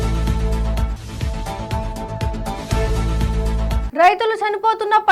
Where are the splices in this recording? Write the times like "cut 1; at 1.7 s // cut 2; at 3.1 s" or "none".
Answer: none